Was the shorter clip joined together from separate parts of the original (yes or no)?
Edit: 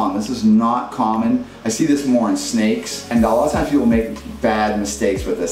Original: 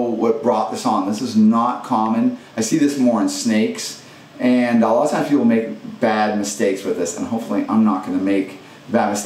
yes